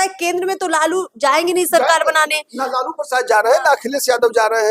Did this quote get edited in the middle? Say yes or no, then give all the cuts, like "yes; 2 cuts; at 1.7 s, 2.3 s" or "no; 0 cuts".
no; 0 cuts